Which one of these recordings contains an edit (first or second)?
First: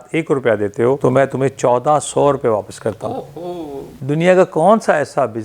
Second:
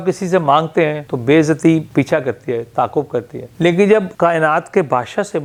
first